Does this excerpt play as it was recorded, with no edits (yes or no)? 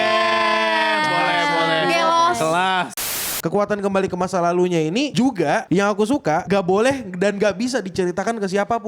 no